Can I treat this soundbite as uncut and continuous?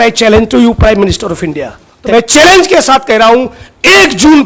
no; 1 cut; at 1.9 s

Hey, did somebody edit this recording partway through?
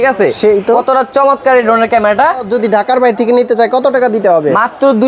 yes; 1 cut; at 2.5 s

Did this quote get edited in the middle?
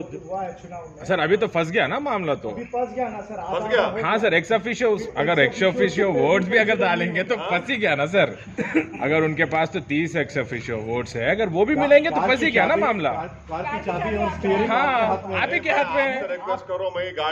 no; 0 cuts

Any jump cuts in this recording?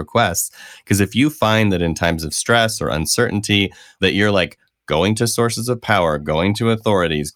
yes; 1 cut; at 3.9 s

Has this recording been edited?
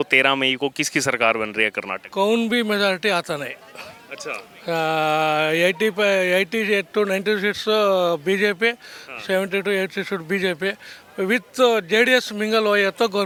no; 0 cuts

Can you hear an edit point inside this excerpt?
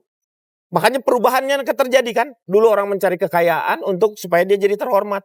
no; 0 cuts

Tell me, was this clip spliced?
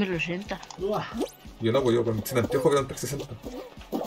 no; 0 cuts

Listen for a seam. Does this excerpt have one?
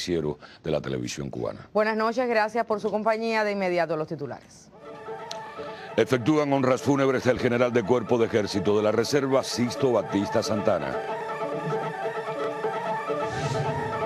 yes; 1 cut; at 1.9 s

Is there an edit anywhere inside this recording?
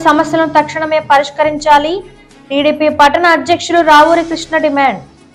no; 0 cuts

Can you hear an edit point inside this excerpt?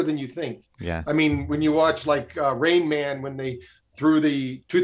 no; 0 cuts

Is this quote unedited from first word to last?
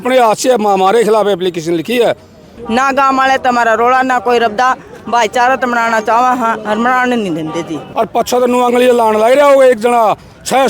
no; 2 cuts; at 2.5 s, 7.8 s

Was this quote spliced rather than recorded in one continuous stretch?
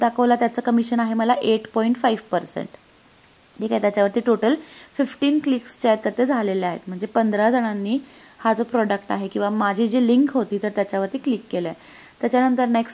no; 0 cuts

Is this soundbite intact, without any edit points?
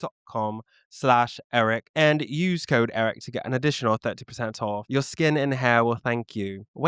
yes; 0 cuts

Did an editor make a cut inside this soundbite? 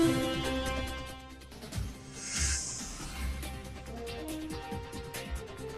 no; 0 cuts

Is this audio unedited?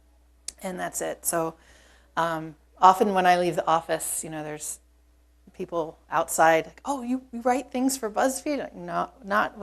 yes; 0 cuts

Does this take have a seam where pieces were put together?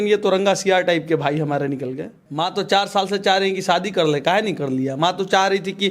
yes; 1 cut; at 2.2 s

